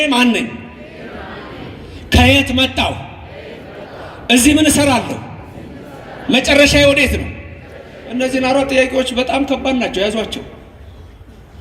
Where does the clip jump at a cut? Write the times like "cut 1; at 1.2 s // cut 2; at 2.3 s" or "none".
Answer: none